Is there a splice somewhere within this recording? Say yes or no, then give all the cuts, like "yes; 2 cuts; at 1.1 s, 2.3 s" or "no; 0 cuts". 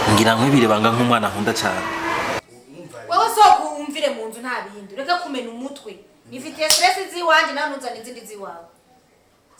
yes; 1 cut; at 2.4 s